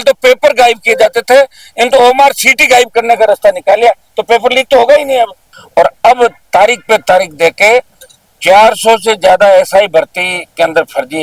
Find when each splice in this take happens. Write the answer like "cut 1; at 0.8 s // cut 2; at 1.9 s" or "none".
cut 1; at 5.5 s